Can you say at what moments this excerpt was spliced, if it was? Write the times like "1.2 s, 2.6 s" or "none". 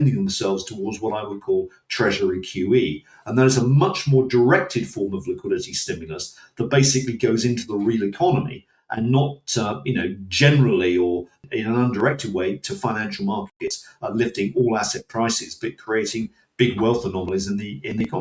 none